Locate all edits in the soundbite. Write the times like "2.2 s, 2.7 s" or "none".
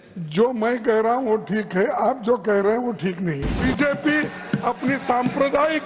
3.5 s